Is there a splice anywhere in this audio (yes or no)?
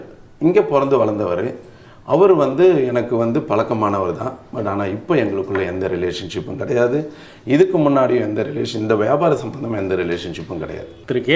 no